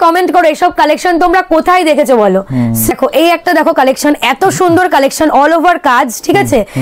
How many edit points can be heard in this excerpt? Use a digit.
1